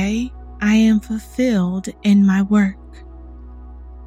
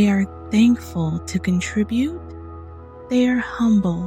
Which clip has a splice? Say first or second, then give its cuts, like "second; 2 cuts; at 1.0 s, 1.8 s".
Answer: first; 1 cut; at 2.8 s